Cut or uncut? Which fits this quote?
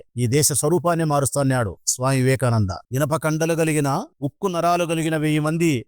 uncut